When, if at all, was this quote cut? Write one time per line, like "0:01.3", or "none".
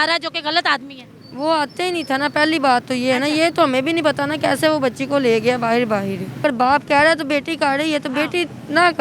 0:06.4